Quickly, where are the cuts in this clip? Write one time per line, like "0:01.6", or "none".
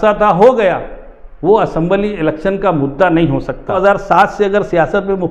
0:03.8